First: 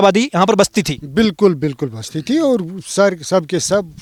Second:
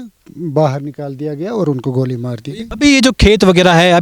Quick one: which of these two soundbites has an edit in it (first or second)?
second